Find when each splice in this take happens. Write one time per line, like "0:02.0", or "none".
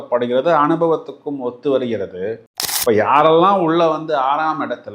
0:02.4

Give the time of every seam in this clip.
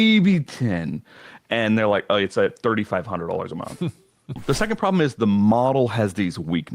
0:04.4

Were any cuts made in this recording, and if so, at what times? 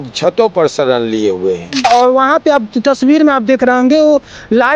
0:01.8

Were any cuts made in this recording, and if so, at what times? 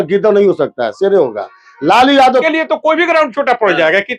0:02.4

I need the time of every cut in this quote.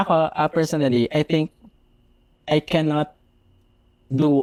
none

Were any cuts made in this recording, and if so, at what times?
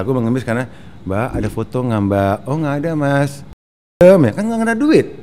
0:04.0

